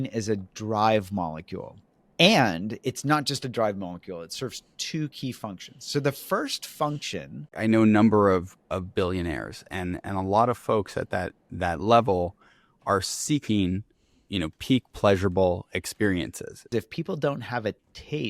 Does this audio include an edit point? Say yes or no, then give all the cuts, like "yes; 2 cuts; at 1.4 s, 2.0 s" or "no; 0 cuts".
yes; 2 cuts; at 7.5 s, 16.7 s